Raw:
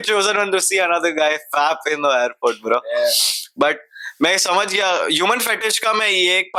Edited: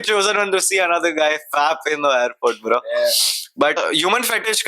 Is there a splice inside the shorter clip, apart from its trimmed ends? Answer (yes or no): yes